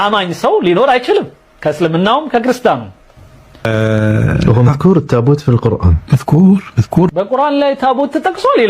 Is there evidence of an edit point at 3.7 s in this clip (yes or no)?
yes